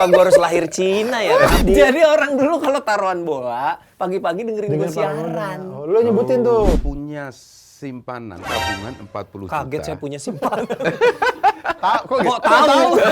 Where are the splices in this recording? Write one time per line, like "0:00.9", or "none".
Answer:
0:01.6
0:06.8